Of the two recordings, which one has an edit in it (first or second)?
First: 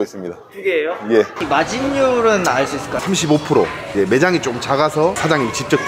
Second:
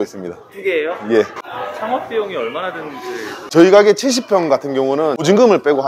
first